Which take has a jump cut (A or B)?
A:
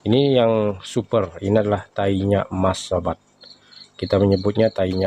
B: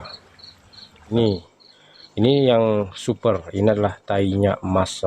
B